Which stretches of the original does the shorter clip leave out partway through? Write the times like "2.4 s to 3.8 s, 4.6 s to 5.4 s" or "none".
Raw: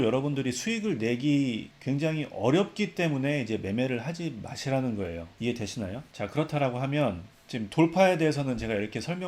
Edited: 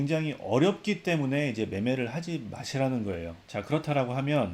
5.3 s to 6.0 s